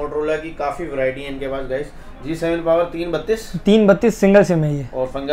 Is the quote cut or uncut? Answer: uncut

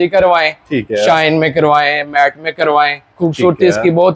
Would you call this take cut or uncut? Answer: uncut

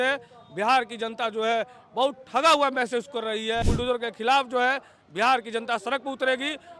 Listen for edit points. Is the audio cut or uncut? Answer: cut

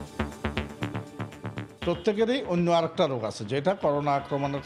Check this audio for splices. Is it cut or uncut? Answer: cut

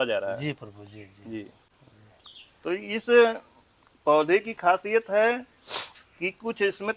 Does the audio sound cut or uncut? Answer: uncut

